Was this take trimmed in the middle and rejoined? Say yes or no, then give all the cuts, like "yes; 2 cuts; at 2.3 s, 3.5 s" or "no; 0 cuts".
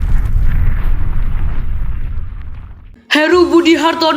yes; 1 cut; at 2.9 s